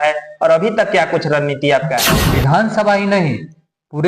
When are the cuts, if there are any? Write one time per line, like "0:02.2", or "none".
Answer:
0:02.1